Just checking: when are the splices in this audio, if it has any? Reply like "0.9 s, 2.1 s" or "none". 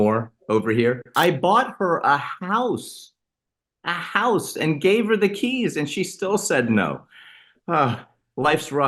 1.1 s